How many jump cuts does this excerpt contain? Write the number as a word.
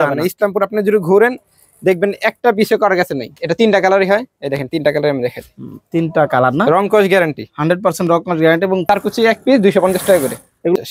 two